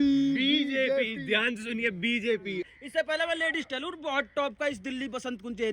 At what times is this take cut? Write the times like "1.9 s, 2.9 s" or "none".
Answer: 2.7 s